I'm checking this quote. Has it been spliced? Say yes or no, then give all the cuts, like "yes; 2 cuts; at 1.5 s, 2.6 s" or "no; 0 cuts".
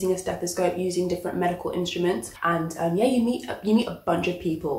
yes; 1 cut; at 2.4 s